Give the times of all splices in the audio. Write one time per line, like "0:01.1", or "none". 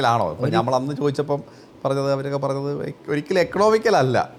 none